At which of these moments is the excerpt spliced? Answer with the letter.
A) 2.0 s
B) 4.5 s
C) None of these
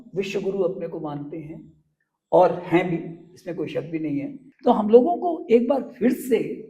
B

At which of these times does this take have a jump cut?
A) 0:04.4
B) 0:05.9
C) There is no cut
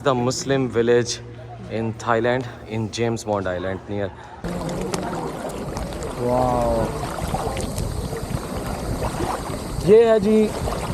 A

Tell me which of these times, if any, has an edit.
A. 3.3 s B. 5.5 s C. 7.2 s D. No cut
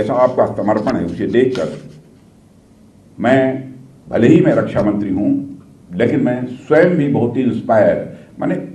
D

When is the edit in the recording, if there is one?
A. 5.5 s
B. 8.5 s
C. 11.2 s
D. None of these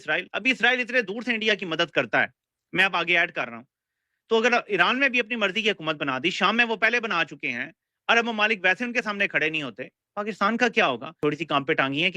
C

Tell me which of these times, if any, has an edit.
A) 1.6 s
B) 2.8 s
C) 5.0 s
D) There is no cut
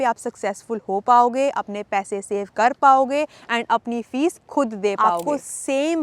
C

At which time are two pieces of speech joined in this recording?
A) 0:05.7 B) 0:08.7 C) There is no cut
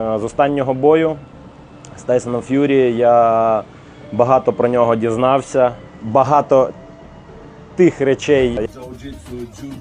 B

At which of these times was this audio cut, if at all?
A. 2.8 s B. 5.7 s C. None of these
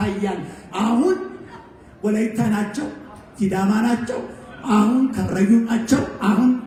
C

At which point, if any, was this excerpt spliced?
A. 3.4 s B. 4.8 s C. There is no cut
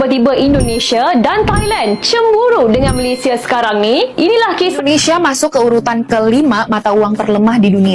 B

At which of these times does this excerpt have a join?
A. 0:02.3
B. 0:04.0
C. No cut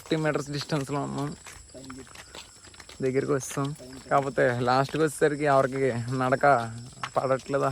C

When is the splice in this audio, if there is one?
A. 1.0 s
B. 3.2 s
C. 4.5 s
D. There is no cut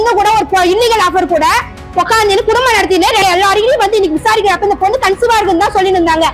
B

